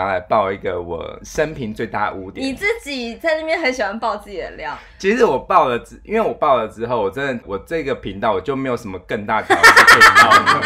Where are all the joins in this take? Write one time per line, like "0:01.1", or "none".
0:01.2
0:07.4